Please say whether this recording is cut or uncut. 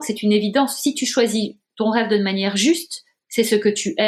uncut